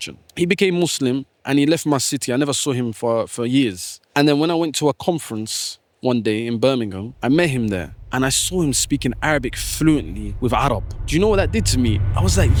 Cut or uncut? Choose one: uncut